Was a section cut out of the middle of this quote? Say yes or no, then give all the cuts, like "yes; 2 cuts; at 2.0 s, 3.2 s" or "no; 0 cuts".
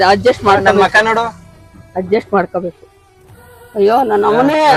no; 0 cuts